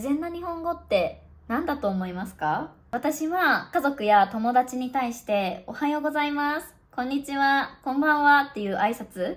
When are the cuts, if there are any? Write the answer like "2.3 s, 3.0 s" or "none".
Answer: 2.8 s, 3.6 s